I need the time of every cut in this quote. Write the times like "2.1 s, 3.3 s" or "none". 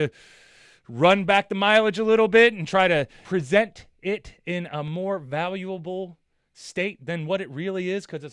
3.2 s